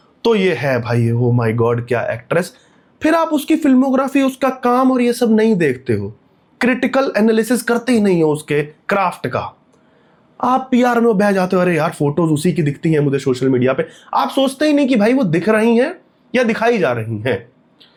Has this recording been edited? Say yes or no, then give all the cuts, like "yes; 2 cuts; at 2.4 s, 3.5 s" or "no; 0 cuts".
no; 0 cuts